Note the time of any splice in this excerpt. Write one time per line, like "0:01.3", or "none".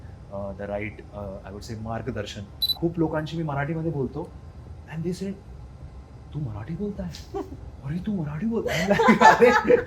0:02.6